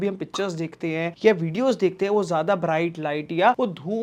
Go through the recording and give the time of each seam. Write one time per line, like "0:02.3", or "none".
none